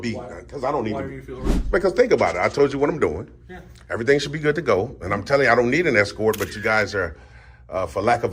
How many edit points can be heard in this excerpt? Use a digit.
0